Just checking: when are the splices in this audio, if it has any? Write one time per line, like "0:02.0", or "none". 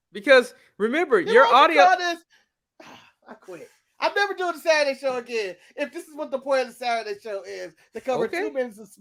none

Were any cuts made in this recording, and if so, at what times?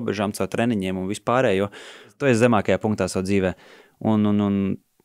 0:02.2

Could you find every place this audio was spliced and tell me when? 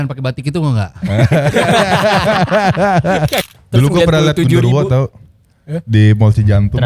0:03.5

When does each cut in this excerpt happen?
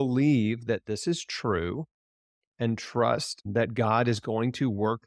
0:03.5

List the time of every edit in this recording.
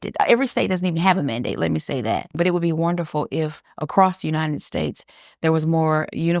0:02.3

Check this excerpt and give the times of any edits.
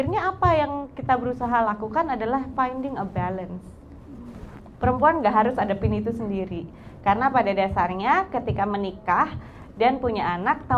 none

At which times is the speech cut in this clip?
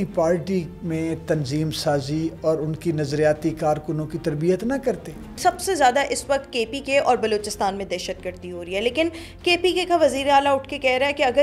0:05.4

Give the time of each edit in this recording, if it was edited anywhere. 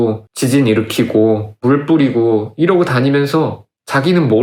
none

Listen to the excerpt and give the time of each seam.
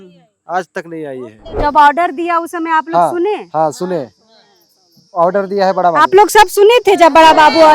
0:01.6

